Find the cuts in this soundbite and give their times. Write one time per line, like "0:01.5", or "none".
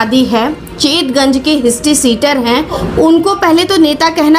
0:02.8